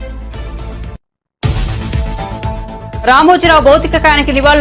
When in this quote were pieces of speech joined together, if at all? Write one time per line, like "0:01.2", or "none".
none